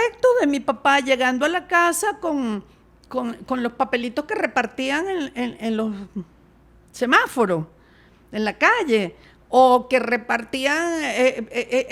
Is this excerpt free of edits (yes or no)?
yes